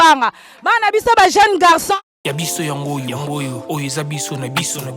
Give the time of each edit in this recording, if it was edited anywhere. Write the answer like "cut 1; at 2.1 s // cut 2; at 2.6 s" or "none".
cut 1; at 1.9 s